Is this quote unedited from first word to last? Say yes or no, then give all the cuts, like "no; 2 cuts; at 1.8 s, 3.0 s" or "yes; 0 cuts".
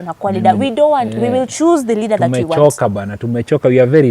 yes; 0 cuts